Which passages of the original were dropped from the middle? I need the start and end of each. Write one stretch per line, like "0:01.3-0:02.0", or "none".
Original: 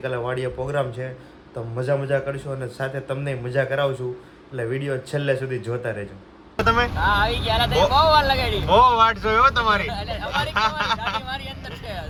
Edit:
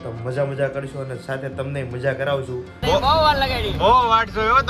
0:04.3-0:07.7

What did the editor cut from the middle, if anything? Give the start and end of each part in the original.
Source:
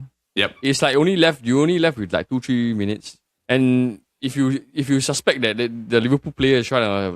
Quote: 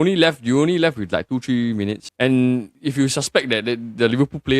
0:03.0-0:03.3
0:04.0-0:04.7

